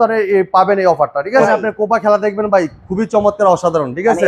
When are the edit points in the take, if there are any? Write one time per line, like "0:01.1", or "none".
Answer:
0:01.4